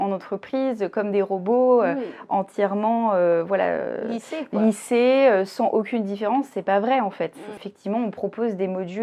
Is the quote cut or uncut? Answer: cut